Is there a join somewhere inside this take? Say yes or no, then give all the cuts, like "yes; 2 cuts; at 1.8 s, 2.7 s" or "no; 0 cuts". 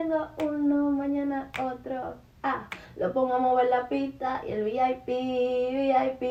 no; 0 cuts